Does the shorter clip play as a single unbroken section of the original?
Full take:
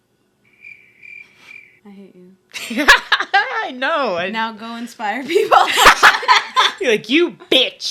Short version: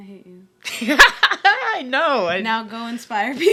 yes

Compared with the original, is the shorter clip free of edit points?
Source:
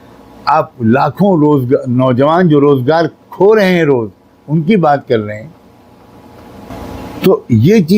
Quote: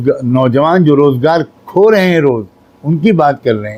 yes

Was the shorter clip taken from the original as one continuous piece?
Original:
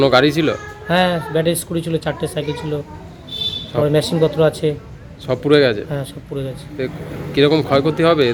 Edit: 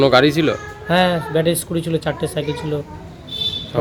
yes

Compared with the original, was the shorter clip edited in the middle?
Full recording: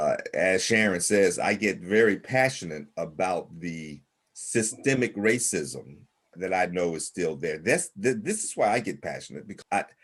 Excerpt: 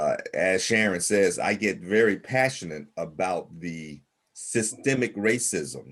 no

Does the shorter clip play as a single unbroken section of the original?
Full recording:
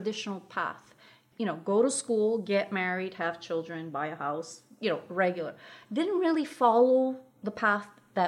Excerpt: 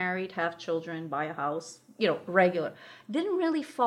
yes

